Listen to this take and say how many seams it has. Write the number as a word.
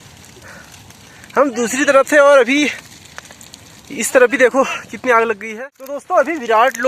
one